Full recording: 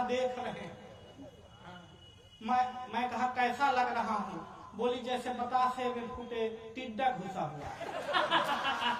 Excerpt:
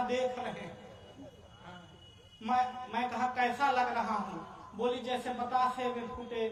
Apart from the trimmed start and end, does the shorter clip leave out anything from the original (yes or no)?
no